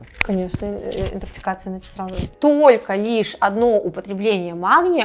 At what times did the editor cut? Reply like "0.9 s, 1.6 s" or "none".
2.3 s